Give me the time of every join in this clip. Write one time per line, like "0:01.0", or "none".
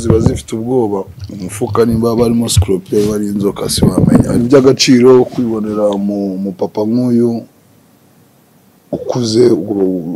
0:04.4

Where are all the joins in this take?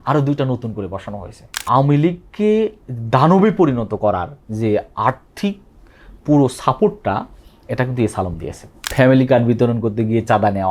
0:01.6
0:08.9

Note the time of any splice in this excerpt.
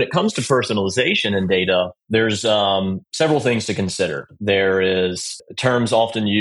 0:02.0
0:03.0
0:04.3
0:05.3

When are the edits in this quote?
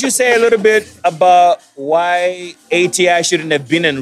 0:00.9
0:02.5

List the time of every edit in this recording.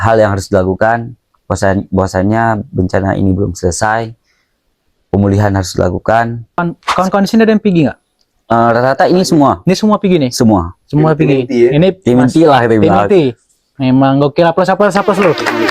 0:06.6

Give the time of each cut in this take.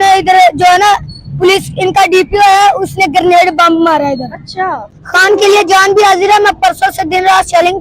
0:04.9

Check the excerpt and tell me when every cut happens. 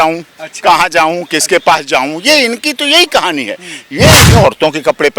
0:04.2

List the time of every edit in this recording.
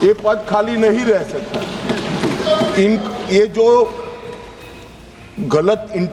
none

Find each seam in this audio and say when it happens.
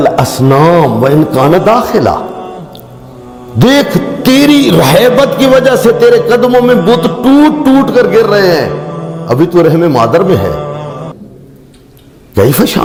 none

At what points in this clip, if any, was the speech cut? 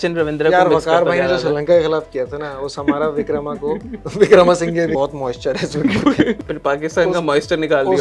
0:04.9
0:06.4

